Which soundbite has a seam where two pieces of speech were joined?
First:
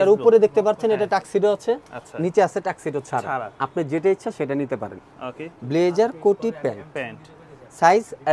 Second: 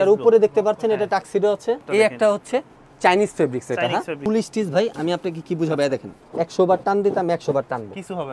second; 3 cuts; at 1.8 s, 4.2 s, 6.2 s

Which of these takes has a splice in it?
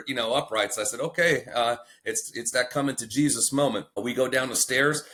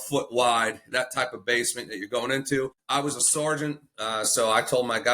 second; 1 cut; at 2.8 s

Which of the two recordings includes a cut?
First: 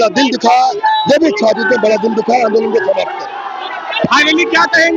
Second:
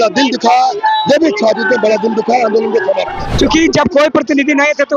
second; 1 cut; at 3.2 s

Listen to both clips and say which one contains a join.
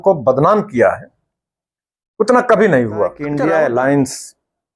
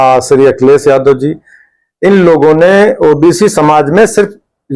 first; 1 cut; at 3.2 s

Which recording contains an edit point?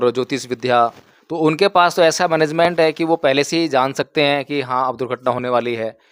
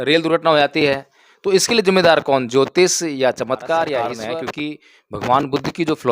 second; 1 cut; at 4.2 s

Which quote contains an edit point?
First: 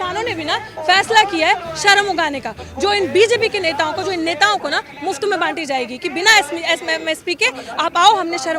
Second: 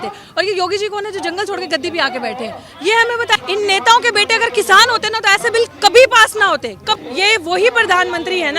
second; 2 cuts; at 3.4 s, 7.0 s

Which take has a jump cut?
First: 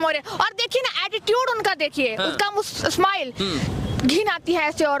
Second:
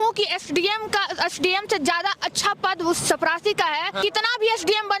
second; 1 cut; at 4.0 s

